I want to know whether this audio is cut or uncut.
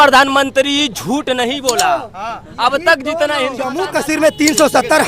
cut